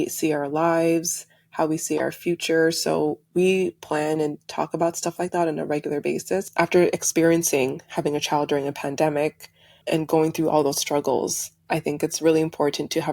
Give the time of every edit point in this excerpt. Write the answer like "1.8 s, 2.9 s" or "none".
6.5 s

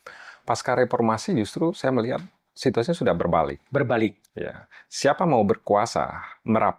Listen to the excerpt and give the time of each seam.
none

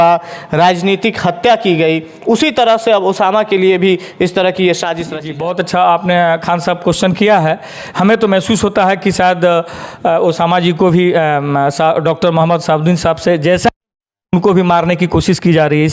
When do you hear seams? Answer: 5.3 s

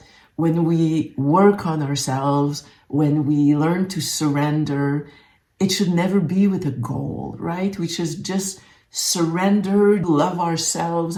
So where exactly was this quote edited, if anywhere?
none

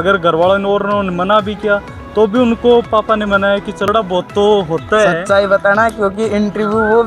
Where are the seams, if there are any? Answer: 3.9 s

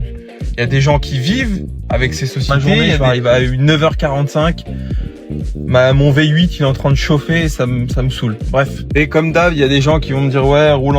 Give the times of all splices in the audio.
3.0 s, 8.8 s

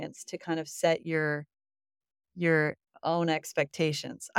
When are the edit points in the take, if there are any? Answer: none

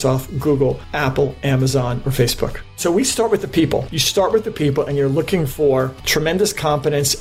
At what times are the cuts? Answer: 0.9 s, 2.7 s, 3.9 s

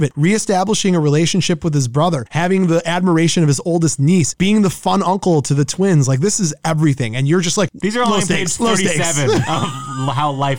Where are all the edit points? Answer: none

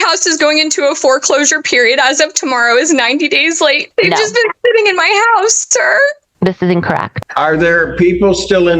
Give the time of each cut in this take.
3.8 s, 7.1 s

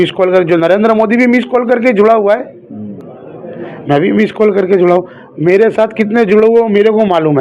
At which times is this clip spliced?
none

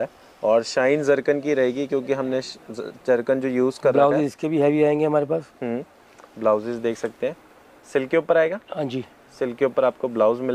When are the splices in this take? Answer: none

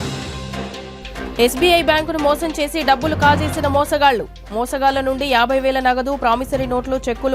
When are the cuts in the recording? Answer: 1.4 s

